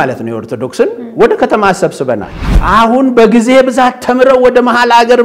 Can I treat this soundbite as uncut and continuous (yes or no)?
no